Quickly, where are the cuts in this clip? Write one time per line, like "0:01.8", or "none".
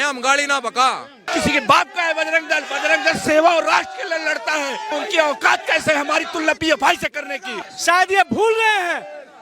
0:01.2
0:04.9
0:07.6